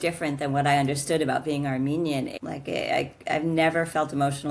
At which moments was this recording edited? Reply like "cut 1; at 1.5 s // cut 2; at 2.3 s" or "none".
cut 1; at 2.3 s